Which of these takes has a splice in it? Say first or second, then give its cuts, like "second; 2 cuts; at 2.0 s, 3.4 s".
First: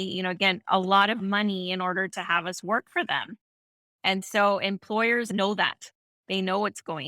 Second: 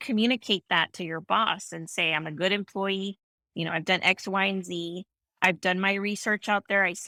first; 1 cut; at 5.3 s